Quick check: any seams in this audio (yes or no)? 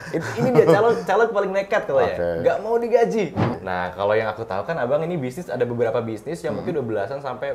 yes